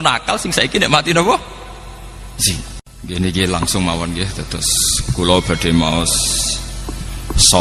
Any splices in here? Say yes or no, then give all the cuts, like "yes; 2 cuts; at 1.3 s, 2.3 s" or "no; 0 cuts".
yes; 1 cut; at 2.9 s